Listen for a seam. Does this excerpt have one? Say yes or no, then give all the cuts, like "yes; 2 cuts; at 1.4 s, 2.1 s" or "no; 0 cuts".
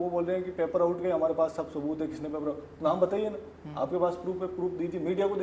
no; 0 cuts